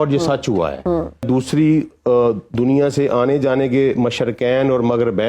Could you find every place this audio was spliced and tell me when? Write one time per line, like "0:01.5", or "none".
0:01.2